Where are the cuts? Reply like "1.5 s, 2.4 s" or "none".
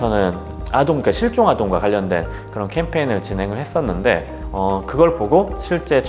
4.3 s